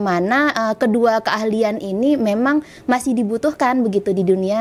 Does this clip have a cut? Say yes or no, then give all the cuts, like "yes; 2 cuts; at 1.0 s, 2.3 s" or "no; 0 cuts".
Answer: no; 0 cuts